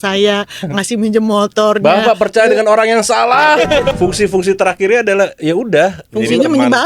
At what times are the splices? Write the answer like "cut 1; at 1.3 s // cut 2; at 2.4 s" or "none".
cut 1; at 3.9 s